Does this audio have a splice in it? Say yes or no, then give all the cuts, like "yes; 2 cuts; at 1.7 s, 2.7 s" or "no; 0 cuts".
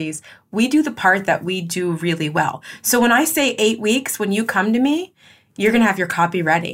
no; 0 cuts